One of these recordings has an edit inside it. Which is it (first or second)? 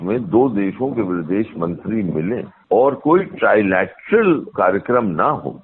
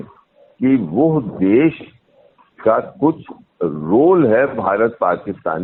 first